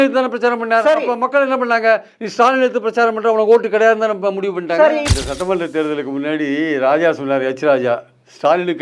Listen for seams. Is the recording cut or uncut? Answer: cut